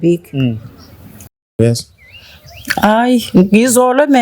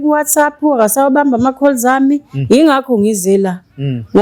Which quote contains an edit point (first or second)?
first